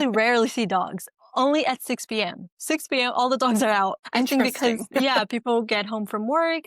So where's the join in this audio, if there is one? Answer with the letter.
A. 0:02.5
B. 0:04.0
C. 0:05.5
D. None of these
B